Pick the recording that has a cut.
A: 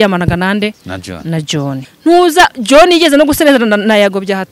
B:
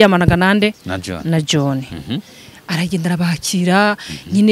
A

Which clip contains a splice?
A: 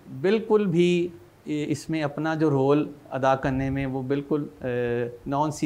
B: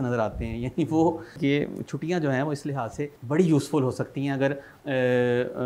B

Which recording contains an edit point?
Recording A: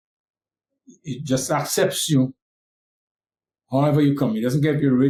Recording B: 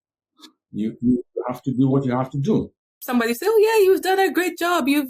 B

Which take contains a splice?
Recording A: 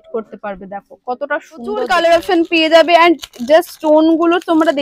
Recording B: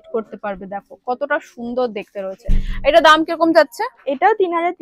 A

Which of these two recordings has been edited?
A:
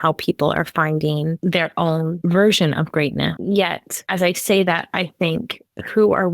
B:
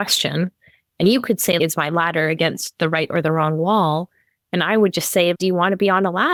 A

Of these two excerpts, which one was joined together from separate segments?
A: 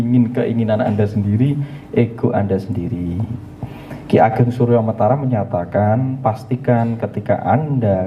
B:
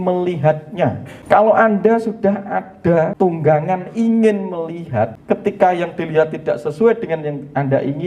B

